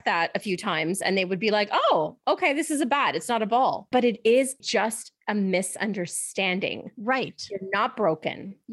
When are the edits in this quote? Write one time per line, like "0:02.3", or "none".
0:03.8